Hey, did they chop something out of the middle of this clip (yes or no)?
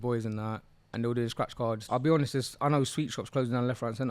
yes